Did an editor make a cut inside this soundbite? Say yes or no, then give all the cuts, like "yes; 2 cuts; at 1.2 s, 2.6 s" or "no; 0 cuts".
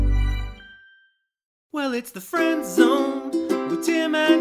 yes; 1 cut; at 1.6 s